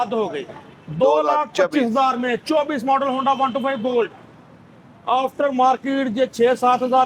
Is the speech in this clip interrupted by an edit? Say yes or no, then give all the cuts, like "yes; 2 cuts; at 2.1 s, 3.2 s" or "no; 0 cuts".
no; 0 cuts